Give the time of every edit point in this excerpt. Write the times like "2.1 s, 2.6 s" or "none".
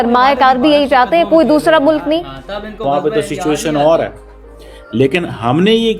2.8 s

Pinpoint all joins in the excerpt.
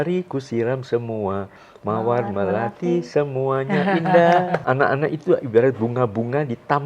4.6 s

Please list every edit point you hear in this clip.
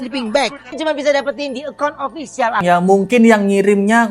0.8 s, 2.6 s

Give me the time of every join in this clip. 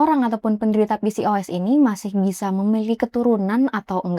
none

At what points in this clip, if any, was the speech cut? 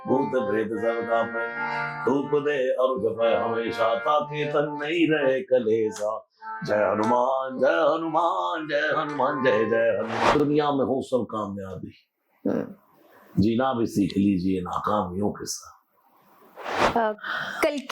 10.4 s, 16.8 s

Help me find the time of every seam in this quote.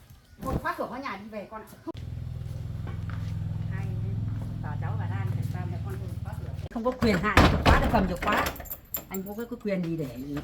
1.9 s, 6.6 s

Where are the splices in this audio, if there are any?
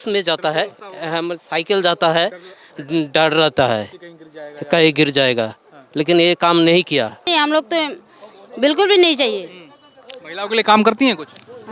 7.2 s

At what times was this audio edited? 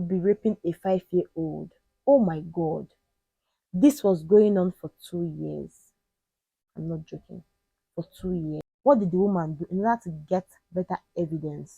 8.6 s

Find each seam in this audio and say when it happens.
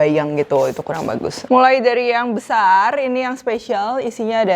1.4 s

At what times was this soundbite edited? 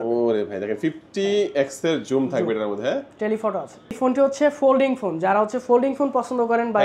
4.0 s

